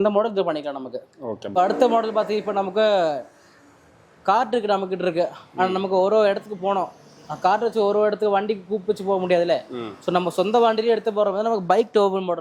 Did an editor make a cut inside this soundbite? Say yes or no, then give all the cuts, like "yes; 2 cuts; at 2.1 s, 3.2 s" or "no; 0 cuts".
yes; 1 cut; at 1.5 s